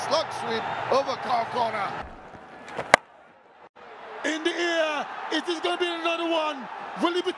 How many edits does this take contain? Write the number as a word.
one